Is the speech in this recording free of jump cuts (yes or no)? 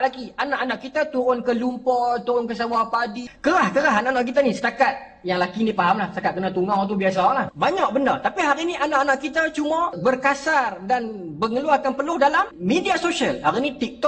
no